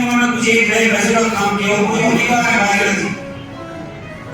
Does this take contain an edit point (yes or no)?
yes